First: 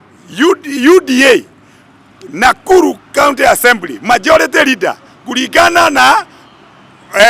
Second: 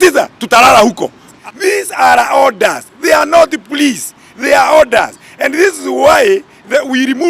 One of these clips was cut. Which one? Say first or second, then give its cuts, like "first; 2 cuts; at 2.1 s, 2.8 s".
second; 1 cut; at 1.3 s